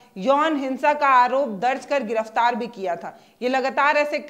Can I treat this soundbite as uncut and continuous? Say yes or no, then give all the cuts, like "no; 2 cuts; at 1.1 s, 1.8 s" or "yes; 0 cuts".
yes; 0 cuts